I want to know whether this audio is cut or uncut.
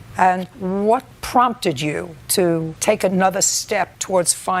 uncut